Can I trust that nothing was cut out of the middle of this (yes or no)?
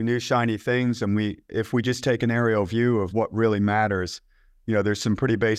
yes